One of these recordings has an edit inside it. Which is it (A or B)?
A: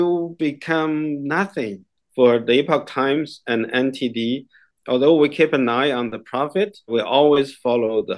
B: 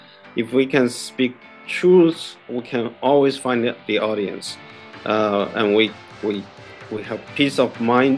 A